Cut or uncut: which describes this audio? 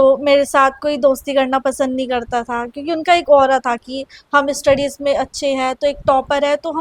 uncut